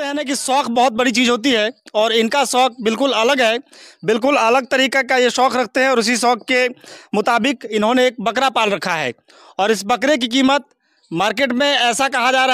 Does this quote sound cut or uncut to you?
uncut